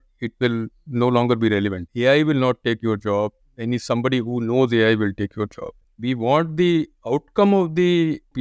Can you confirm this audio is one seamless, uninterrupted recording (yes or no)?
no